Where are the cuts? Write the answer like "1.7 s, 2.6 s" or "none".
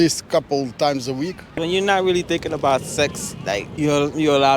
1.6 s, 3.7 s